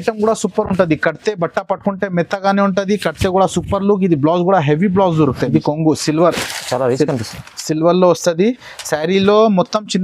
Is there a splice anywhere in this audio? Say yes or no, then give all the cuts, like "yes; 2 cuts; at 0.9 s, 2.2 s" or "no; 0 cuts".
yes; 1 cut; at 5.4 s